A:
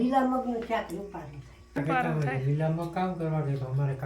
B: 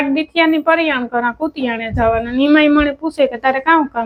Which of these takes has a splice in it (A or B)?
A